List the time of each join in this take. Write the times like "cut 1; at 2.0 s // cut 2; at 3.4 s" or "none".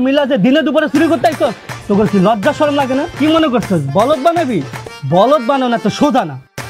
cut 1; at 3.1 s

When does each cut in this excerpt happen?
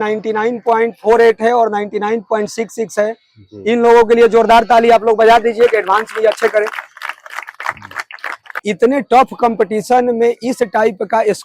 cut 1; at 8.6 s

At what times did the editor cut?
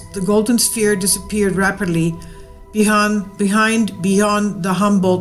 cut 1; at 4.0 s

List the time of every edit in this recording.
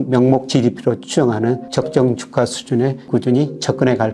cut 1; at 1.7 s // cut 2; at 3.1 s

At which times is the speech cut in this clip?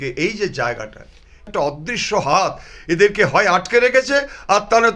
cut 1; at 1.5 s

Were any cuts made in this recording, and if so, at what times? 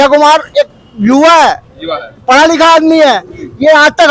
none

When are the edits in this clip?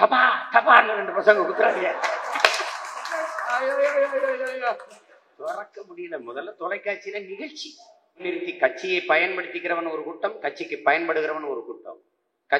cut 1; at 8.3 s

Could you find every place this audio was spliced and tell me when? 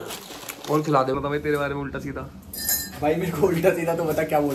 cut 1; at 1.1 s

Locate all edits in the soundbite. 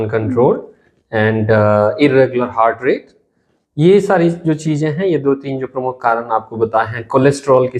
none

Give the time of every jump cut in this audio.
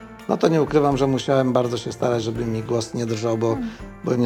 none

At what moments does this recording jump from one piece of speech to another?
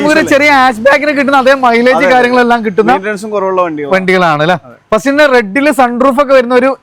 none

